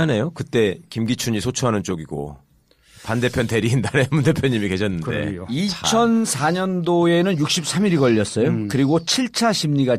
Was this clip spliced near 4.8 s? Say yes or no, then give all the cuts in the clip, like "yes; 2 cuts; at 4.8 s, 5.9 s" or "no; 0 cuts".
yes; 1 cut; at 4.8 s